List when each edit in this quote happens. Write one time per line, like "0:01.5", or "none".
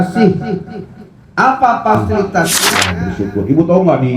0:03.0